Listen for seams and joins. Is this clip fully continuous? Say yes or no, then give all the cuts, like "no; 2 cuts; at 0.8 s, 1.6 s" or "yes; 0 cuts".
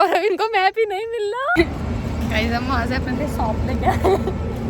no; 1 cut; at 1.5 s